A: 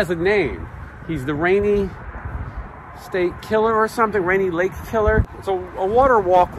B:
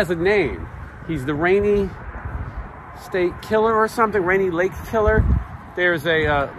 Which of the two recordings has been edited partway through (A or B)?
A